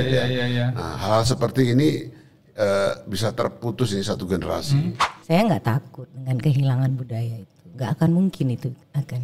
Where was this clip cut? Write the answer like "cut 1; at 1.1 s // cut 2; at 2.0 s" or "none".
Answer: cut 1; at 5.1 s